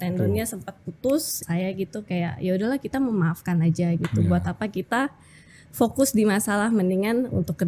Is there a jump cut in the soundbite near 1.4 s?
yes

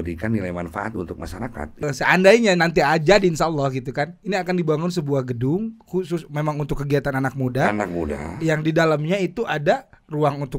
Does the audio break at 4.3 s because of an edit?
no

